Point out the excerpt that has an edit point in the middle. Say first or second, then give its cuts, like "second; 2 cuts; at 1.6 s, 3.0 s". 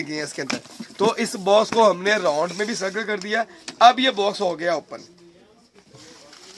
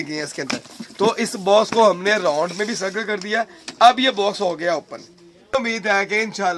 second; 1 cut; at 5.5 s